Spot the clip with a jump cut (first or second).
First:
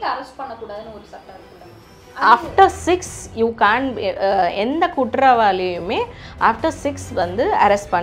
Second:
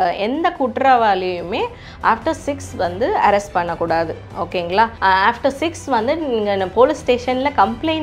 second